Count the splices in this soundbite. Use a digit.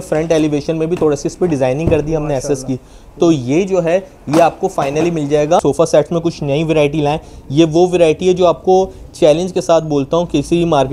1